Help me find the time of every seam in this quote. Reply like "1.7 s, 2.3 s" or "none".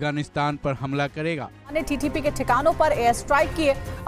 1.7 s